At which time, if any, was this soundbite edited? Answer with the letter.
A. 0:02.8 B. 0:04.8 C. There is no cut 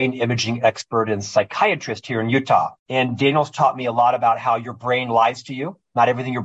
A